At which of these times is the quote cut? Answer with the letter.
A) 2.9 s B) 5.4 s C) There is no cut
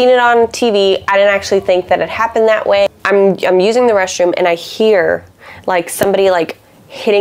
A